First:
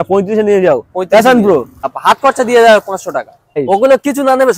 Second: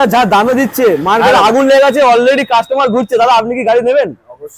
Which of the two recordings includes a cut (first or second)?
first